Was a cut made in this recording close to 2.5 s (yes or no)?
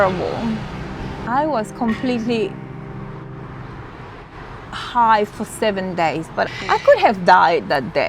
no